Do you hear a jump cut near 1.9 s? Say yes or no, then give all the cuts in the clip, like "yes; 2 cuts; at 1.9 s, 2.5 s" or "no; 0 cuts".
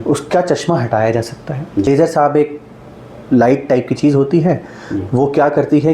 yes; 1 cut; at 1.9 s